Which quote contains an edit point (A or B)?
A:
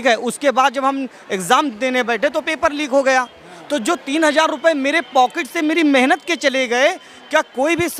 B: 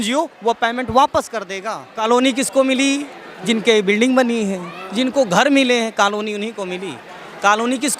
B